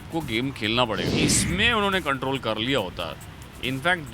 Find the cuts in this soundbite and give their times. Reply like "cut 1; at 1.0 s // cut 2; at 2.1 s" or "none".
cut 1; at 1.1 s